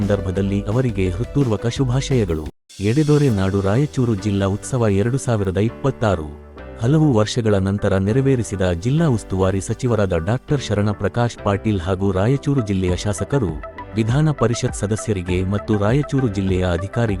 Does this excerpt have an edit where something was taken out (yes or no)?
yes